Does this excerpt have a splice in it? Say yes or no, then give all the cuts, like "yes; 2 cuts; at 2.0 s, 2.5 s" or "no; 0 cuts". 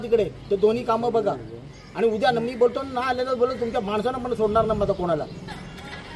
no; 0 cuts